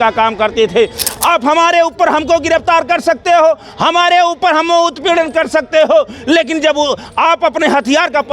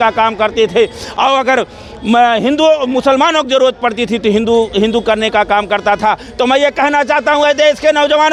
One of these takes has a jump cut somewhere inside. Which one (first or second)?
first